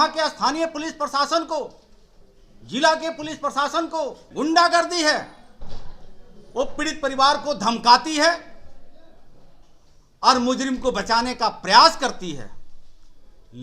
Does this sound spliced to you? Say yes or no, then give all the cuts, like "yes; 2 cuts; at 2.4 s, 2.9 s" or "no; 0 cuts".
yes; 1 cut; at 4.2 s